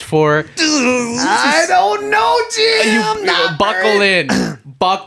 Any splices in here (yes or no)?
no